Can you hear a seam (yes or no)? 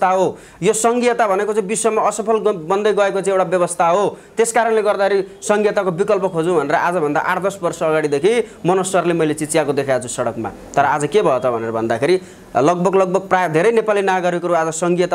no